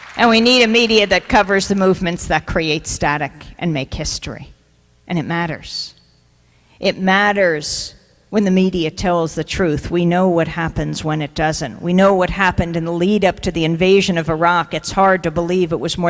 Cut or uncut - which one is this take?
cut